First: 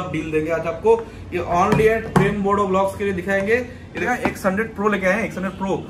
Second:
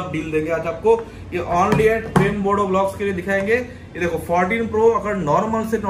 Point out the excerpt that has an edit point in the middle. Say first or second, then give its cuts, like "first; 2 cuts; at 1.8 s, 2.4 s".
first; 1 cut; at 4.0 s